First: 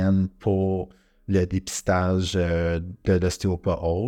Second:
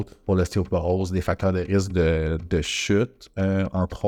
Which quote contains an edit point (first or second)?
first